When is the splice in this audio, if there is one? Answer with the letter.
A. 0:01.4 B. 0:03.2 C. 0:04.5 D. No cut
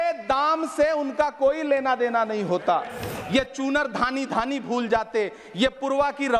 B